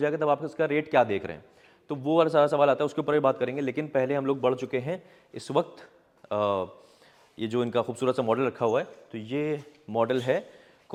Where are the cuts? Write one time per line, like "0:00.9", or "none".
none